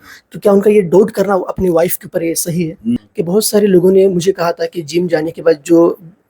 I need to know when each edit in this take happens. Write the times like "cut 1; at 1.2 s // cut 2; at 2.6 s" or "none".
cut 1; at 3.0 s